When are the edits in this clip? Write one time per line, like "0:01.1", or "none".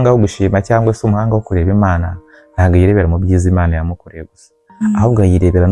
none